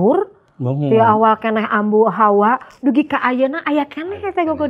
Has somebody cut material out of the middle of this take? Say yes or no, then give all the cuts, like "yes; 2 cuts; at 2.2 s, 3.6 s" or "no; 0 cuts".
no; 0 cuts